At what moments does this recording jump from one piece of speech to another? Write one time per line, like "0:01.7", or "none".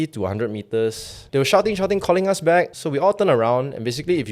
0:01.1
0:02.8